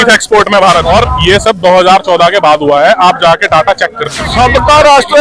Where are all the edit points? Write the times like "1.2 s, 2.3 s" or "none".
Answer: 0.8 s, 4.2 s